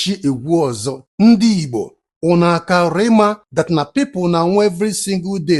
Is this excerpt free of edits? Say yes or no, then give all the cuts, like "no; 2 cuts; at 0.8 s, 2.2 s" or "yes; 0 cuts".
no; 1 cut; at 1.0 s